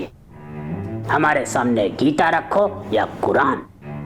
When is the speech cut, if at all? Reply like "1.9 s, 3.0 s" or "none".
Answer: none